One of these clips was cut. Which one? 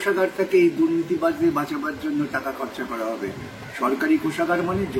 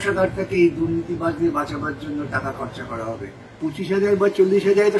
second; 1 cut; at 3.7 s

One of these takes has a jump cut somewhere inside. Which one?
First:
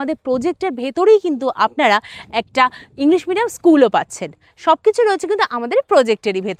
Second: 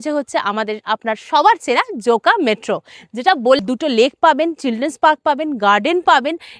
second; 1 cut; at 3.6 s

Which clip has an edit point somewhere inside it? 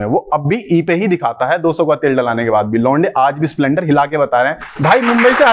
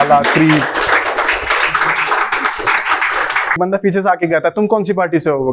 second; 1 cut; at 3.6 s

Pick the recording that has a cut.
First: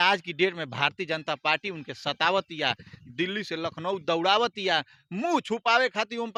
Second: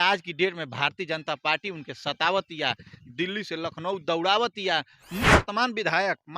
second; 1 cut; at 5.2 s

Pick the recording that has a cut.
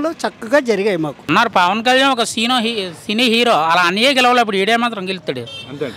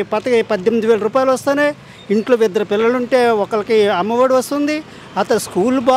first; 1 cut; at 1.2 s

